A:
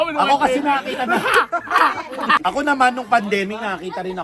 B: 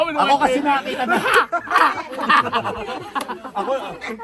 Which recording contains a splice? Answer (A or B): A